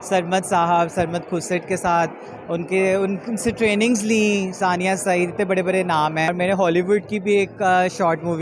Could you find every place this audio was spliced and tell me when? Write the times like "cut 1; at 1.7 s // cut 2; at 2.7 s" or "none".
cut 1; at 6.3 s